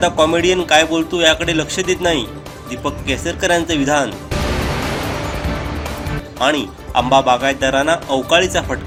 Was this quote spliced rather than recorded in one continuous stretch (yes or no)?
no